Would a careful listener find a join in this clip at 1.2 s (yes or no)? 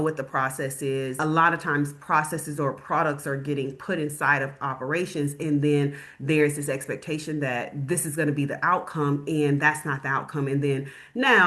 yes